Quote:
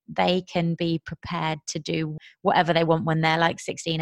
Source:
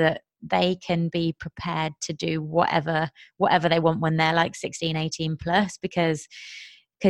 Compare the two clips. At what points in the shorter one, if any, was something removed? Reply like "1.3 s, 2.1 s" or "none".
2.2 s